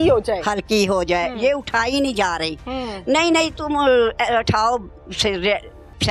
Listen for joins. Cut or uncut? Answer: uncut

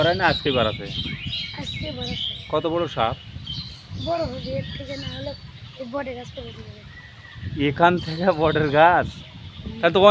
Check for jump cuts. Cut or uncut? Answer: uncut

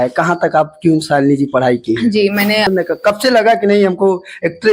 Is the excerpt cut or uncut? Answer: cut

